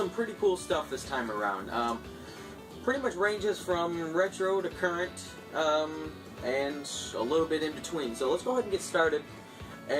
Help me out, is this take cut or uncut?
cut